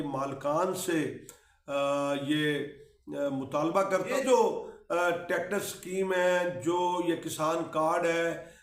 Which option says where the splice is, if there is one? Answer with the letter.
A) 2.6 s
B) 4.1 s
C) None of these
B